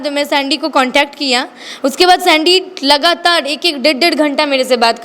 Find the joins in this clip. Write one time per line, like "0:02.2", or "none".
none